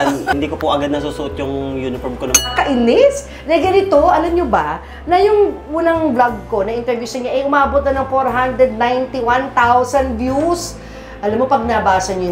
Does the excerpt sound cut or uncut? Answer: cut